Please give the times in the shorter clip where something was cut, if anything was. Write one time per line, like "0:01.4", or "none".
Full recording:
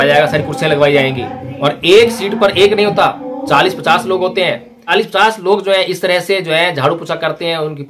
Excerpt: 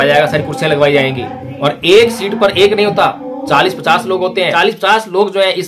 0:04.5

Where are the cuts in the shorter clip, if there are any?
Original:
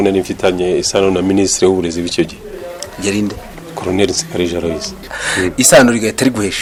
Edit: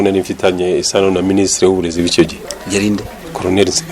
0:03.0

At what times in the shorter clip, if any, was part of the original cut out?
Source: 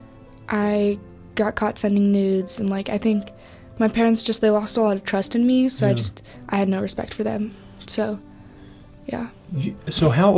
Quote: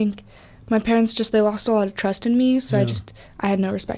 none

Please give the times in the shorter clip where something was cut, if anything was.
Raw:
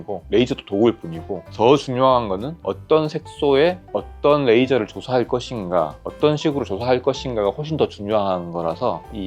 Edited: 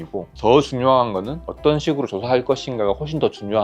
0:01.4

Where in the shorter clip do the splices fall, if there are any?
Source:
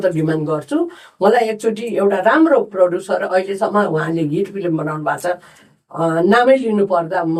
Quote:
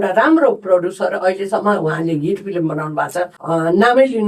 0:03.4

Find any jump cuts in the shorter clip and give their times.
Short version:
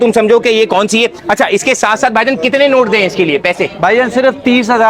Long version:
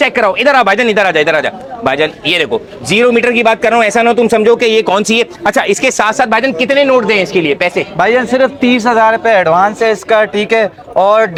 none

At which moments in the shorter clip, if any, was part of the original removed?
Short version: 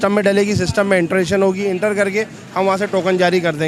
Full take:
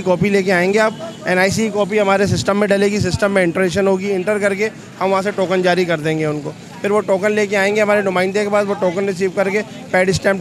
none

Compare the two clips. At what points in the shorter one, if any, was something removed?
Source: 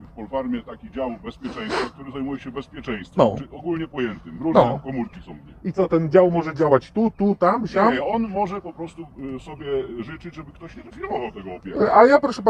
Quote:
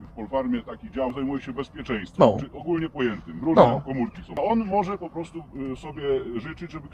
0:01.1
0:04.4

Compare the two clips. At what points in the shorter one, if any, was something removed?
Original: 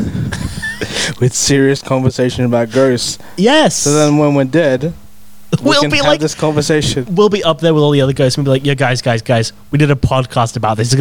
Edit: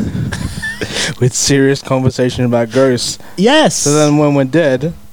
none

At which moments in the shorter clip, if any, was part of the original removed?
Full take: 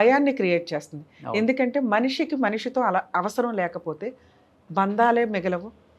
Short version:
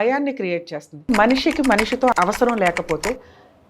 0:01.1
0:02.1

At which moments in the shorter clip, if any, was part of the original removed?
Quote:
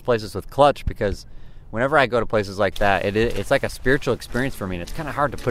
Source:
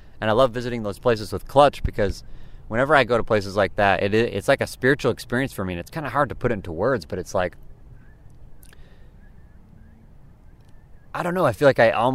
none

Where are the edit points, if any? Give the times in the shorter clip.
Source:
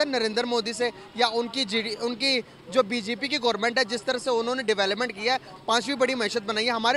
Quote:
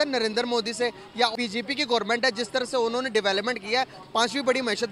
0:01.3

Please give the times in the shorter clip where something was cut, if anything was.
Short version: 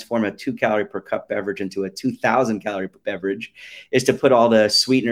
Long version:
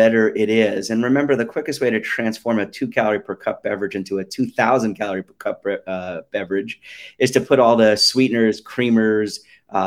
0:03.0

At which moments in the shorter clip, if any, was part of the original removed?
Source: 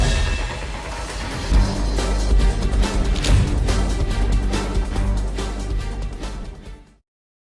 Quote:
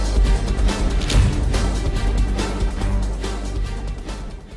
none

